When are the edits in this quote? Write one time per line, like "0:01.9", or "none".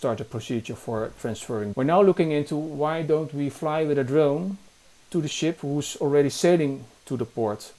0:01.7